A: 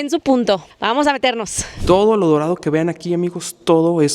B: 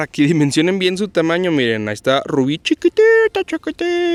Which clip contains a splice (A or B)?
A